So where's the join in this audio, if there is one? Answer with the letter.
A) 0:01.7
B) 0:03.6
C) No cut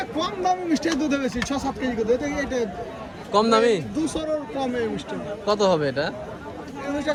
C